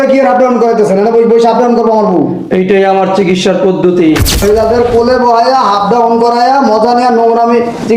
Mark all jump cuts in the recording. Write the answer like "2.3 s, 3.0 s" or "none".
4.4 s